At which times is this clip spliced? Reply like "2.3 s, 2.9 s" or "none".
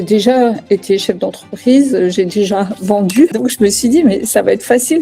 3.3 s